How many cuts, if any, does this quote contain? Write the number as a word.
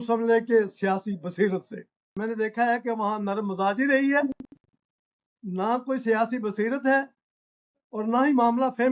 one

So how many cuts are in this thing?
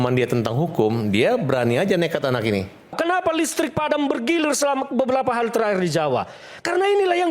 one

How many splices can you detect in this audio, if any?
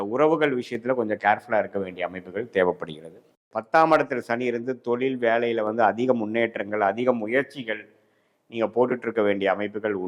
one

